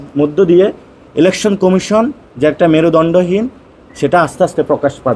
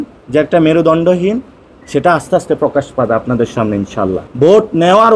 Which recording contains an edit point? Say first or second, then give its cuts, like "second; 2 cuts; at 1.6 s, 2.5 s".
second; 1 cut; at 4.2 s